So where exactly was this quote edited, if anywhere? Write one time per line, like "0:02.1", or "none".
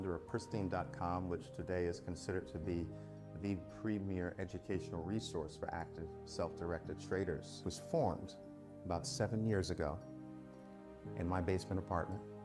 none